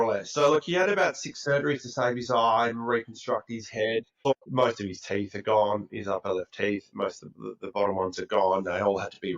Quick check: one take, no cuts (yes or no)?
no